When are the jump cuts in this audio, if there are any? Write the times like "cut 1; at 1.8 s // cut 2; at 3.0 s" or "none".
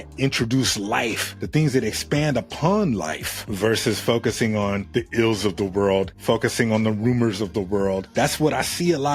none